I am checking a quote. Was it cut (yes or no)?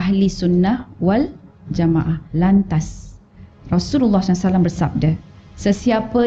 yes